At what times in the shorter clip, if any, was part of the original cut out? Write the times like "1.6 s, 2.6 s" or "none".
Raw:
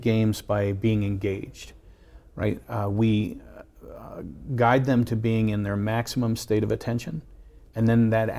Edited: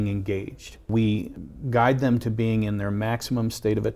0.9 s, 1.5 s